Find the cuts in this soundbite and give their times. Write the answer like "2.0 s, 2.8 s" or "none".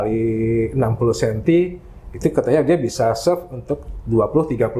none